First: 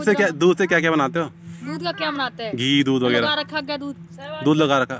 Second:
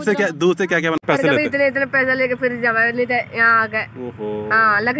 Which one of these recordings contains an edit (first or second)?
second